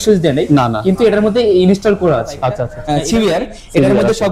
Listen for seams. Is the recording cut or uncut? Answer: cut